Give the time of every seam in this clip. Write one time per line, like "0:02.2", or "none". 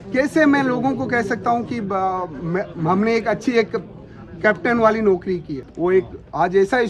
0:05.6